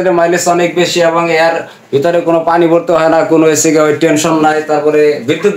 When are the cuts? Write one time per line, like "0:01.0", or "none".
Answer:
none